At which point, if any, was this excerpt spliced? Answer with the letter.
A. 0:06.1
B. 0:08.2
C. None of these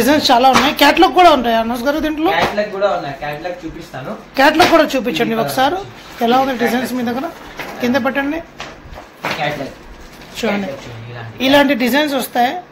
C